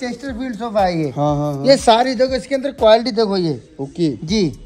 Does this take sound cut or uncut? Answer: uncut